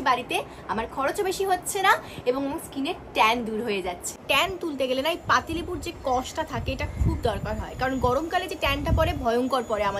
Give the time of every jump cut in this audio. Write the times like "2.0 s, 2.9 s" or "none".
4.2 s